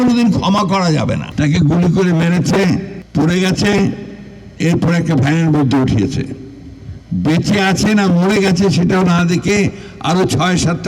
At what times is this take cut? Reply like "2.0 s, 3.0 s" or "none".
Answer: 1.3 s, 3.0 s